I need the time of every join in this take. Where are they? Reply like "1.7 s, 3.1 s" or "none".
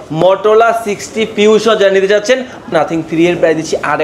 2.7 s

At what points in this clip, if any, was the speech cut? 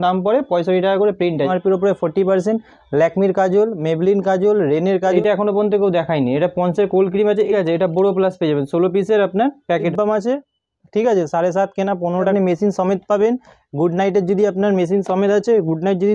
1.5 s, 5.1 s, 7.5 s, 9.9 s, 12.3 s

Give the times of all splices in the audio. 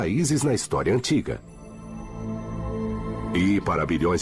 1.0 s

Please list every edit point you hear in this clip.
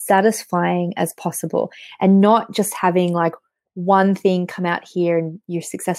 none

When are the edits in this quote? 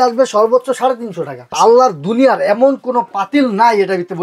1.5 s

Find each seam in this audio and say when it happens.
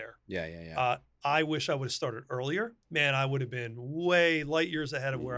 2.8 s

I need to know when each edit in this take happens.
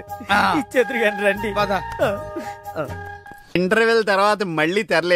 3.5 s

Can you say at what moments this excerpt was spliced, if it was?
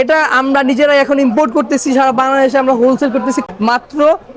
3.5 s

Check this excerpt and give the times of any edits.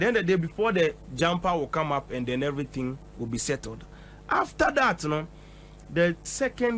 none

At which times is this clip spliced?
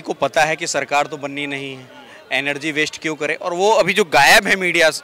none

